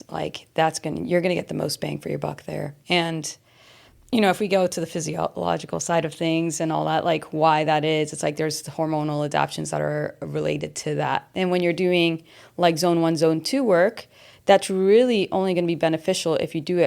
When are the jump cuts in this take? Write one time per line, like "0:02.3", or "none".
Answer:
0:02.8
0:11.3